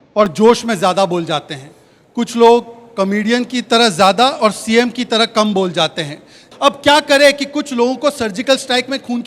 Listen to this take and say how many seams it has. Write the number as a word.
one